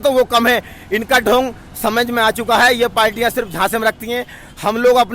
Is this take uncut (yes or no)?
yes